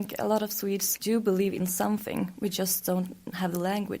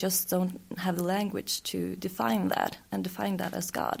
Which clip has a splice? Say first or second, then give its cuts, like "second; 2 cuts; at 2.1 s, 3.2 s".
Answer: first; 1 cut; at 0.9 s